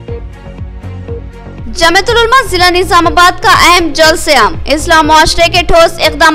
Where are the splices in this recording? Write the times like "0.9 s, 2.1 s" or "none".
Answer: none